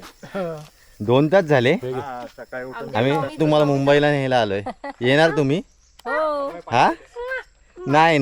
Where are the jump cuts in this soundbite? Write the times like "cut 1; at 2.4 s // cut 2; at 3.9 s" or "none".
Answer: cut 1; at 3.4 s